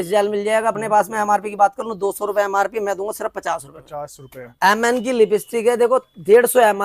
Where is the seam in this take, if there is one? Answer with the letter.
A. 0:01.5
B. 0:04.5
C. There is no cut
B